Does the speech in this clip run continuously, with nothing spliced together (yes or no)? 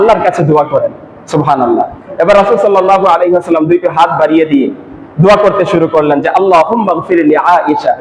yes